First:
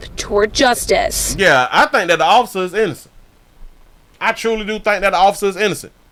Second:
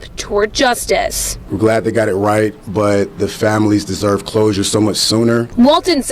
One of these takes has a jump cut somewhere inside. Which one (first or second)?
second